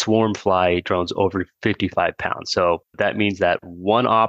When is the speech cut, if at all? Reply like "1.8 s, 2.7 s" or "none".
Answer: 2.9 s